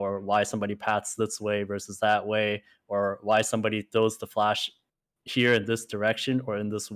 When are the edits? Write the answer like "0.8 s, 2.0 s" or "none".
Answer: none